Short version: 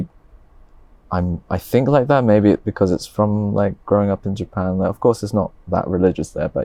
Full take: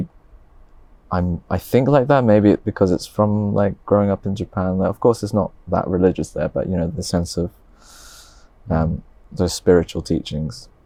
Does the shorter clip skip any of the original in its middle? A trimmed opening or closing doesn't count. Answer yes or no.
no